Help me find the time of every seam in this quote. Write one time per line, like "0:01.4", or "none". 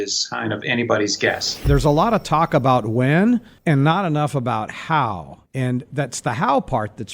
0:01.6